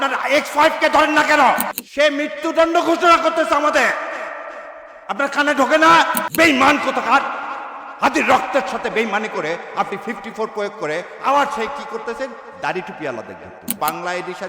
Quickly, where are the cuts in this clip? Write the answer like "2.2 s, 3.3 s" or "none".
1.8 s, 13.7 s